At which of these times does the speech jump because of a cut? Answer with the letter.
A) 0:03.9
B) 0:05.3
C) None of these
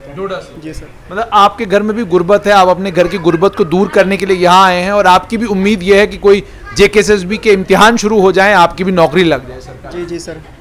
C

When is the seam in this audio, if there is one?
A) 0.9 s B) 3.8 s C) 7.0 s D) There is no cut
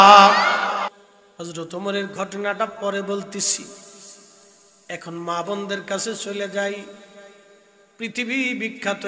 A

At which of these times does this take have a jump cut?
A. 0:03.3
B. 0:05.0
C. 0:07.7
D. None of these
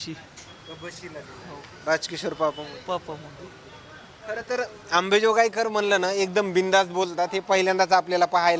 D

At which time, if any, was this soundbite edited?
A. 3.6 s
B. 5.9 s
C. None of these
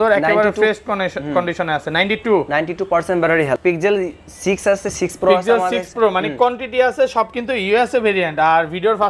A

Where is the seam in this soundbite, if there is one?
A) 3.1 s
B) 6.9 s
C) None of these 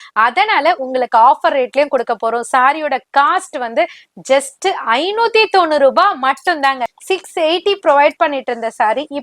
B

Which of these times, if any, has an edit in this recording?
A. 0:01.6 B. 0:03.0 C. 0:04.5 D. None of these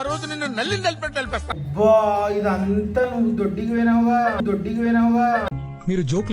A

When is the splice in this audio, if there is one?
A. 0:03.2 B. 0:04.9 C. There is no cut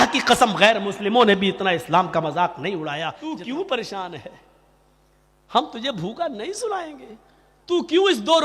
A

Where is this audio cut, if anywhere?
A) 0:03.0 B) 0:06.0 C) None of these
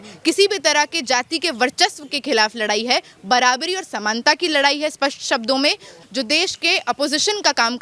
B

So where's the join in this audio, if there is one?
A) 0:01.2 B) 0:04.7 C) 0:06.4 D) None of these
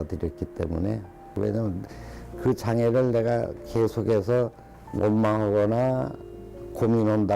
A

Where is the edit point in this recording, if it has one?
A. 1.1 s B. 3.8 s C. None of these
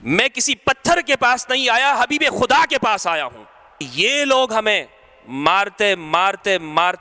B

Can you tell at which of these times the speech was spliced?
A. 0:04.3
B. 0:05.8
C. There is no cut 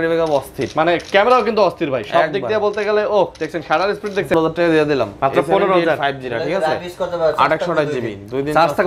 A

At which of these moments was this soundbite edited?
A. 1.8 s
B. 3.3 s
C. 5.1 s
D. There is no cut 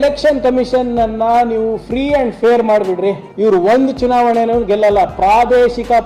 B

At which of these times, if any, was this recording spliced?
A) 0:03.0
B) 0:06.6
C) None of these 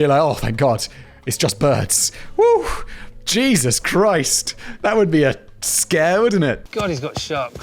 B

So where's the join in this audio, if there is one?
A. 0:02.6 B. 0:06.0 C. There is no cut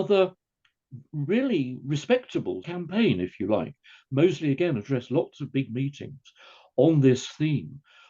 A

